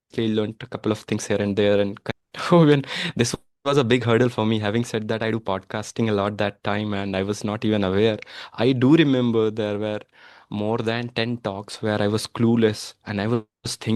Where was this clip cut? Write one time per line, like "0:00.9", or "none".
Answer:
0:02.1